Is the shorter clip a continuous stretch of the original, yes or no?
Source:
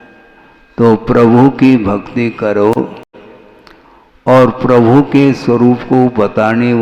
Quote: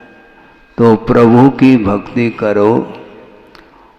no